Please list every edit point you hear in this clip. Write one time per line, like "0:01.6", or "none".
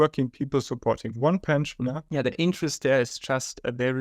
0:02.0